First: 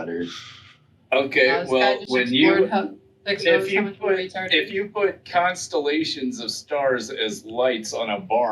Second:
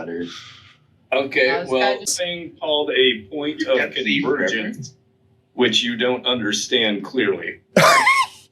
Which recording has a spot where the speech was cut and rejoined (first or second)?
second